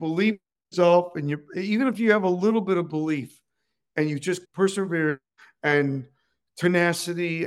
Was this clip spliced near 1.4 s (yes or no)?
no